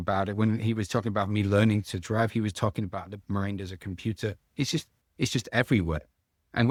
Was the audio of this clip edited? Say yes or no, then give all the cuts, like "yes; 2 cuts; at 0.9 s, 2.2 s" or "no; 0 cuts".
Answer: no; 0 cuts